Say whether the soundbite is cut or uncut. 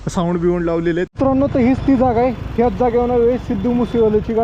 cut